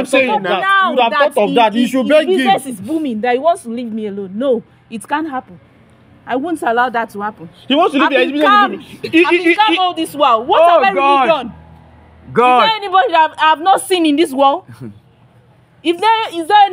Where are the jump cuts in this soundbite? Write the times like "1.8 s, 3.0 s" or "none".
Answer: none